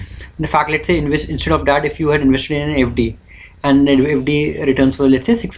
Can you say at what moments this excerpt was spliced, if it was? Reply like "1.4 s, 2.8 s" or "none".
none